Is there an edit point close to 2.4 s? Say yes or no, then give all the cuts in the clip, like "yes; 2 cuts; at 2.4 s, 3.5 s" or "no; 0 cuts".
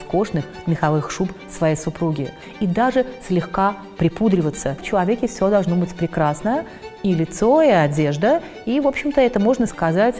yes; 2 cuts; at 2.4 s, 4.8 s